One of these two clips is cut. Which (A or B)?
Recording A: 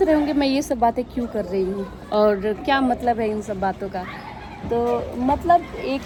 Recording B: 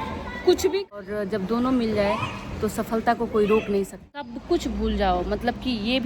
B